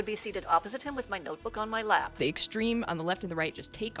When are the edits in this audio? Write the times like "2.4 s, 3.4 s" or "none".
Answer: 2.2 s